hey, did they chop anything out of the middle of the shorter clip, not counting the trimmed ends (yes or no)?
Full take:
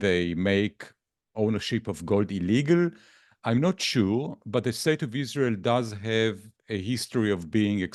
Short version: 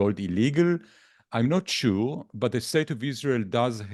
no